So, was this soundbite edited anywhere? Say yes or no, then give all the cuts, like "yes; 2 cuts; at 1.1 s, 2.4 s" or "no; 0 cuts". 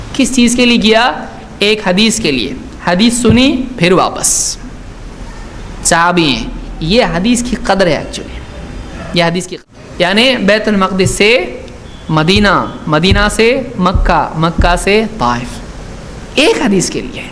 yes; 1 cut; at 9.5 s